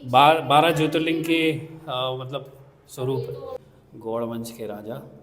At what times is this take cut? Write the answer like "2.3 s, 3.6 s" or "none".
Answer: 3.6 s